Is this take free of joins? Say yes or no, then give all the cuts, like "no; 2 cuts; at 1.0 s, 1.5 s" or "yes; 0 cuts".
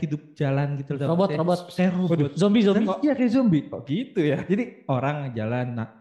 yes; 0 cuts